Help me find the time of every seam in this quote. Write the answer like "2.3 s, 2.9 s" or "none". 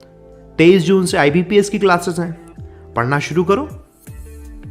3.5 s